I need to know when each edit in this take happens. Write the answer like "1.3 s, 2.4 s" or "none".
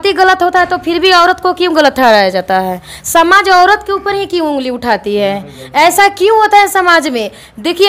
none